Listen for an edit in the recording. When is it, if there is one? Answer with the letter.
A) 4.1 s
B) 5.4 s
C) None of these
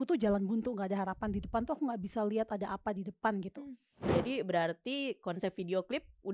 A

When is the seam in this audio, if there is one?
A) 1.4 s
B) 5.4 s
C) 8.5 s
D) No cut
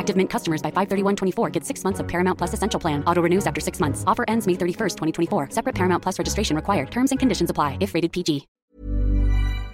C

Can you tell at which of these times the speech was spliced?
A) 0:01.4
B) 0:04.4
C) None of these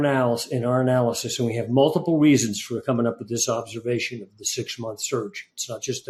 C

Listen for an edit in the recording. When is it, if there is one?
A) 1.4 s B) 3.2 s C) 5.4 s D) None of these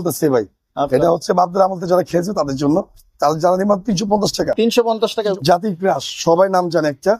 C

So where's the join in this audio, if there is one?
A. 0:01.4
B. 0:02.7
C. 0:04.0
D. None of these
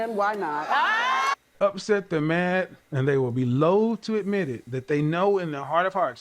A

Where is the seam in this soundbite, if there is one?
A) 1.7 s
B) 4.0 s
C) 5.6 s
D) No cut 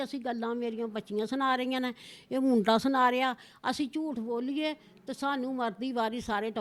D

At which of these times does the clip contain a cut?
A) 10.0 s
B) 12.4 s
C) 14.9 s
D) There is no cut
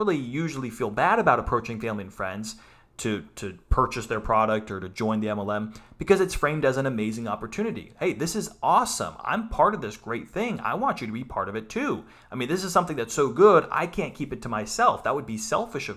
D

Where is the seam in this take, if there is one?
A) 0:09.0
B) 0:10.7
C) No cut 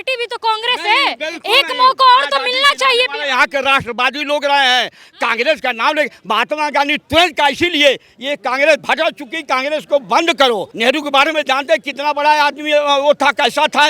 B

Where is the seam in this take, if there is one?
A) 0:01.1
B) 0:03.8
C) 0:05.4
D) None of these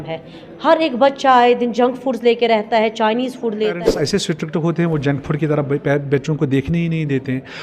B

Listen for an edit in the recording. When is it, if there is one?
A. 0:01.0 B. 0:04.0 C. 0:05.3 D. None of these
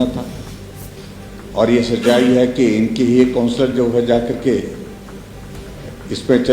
A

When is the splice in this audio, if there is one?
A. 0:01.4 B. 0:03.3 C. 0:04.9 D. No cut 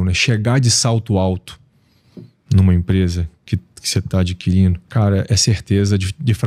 C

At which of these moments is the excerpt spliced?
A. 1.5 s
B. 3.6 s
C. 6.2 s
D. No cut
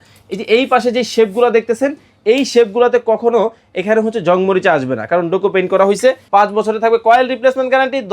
C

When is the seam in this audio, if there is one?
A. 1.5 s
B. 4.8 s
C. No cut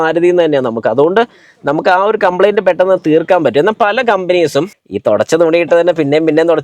B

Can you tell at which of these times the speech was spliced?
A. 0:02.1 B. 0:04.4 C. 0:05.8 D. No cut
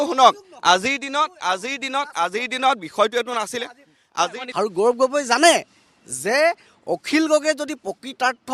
B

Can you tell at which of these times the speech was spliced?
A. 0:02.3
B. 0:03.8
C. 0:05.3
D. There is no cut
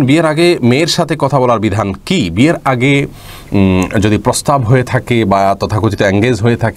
D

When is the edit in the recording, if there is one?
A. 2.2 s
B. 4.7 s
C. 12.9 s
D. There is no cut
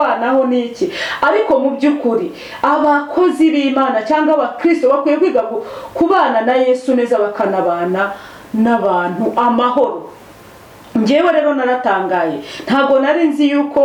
D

